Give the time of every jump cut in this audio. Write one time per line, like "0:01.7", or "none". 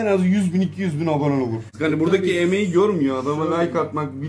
0:01.7